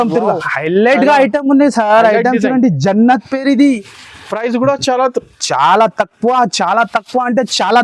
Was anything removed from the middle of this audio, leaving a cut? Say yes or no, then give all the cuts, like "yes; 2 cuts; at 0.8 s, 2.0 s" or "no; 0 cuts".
no; 0 cuts